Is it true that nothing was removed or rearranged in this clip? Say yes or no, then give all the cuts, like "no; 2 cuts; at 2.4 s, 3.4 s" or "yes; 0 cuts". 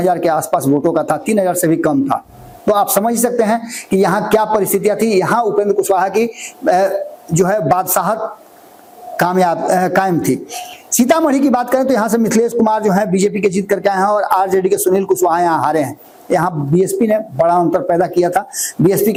yes; 0 cuts